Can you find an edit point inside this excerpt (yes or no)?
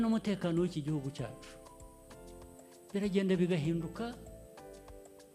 no